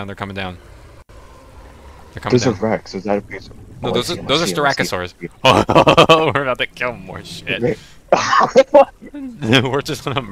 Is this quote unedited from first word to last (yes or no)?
yes